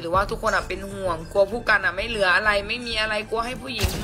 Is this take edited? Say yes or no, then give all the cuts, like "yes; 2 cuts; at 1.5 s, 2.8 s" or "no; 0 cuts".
no; 0 cuts